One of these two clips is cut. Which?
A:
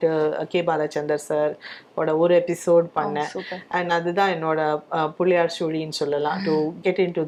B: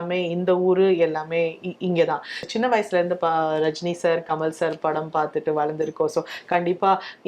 B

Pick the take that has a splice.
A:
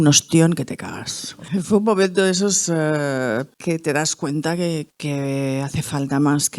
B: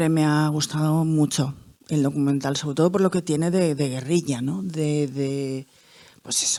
A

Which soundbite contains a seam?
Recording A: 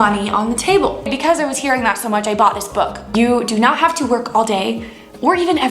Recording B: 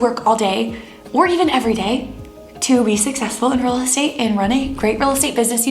A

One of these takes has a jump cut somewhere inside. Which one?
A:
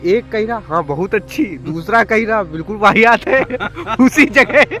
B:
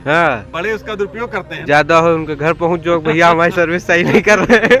B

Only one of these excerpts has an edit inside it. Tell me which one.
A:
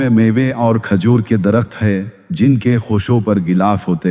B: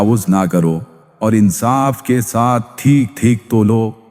B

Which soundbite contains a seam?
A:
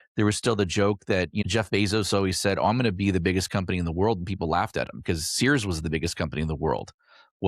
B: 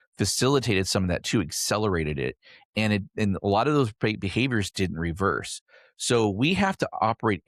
A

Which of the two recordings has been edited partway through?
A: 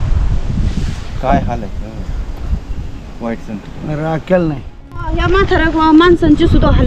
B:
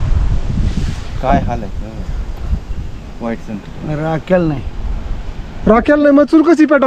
A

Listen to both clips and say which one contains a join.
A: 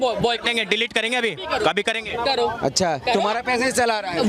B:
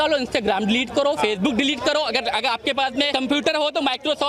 B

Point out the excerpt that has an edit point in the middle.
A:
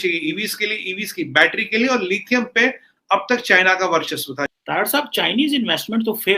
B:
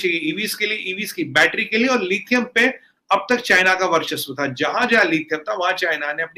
A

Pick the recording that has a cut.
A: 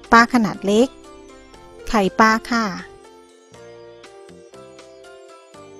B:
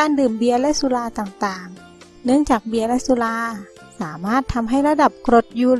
A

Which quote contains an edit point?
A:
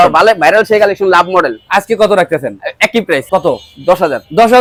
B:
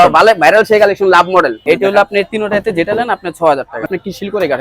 B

